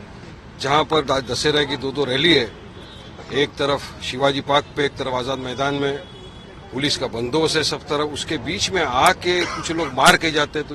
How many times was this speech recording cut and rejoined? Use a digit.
0